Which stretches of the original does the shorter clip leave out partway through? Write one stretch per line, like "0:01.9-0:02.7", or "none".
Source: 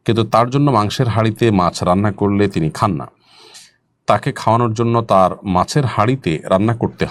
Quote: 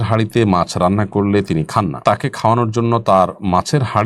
0:03.0-0:04.0